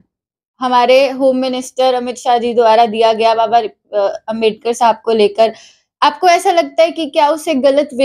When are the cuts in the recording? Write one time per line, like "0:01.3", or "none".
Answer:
none